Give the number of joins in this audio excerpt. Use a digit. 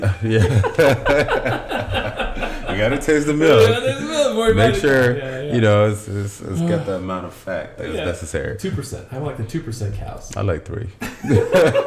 0